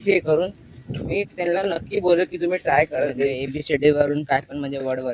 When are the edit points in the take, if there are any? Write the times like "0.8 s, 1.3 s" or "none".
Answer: 3.4 s